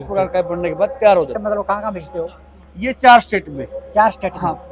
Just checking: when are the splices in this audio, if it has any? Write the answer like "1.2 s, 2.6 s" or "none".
1.4 s